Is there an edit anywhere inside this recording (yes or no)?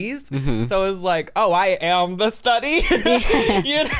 no